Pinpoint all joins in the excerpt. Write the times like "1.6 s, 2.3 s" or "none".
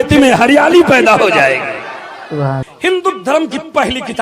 2.7 s